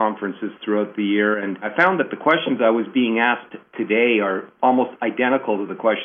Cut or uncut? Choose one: cut